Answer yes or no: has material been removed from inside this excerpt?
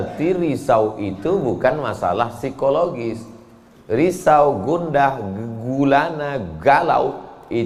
no